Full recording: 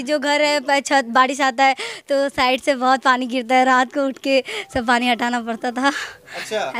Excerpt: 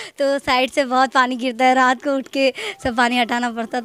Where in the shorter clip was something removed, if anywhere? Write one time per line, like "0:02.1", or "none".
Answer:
none